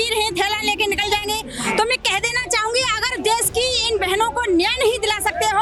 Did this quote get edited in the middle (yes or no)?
no